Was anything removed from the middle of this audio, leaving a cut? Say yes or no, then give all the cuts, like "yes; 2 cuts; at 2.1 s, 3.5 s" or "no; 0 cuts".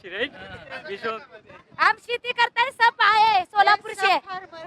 yes; 1 cut; at 1.2 s